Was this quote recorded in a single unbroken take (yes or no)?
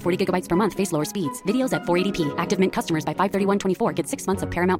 yes